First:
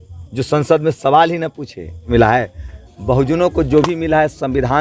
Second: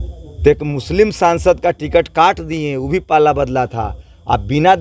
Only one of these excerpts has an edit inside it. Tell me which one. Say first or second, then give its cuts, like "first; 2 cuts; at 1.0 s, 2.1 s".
first; 1 cut; at 2.0 s